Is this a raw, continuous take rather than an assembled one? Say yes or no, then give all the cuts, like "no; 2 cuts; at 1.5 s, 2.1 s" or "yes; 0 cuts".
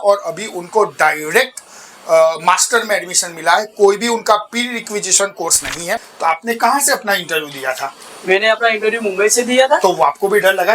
no; 1 cut; at 6.0 s